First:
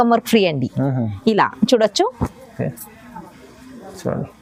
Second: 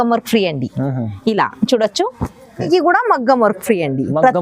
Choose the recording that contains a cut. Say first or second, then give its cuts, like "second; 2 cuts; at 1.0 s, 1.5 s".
second; 1 cut; at 2.7 s